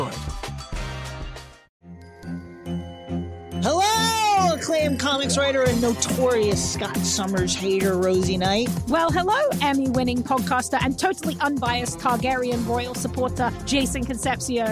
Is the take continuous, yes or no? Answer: no